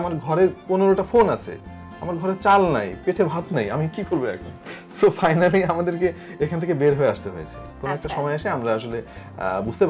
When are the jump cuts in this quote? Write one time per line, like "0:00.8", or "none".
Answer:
none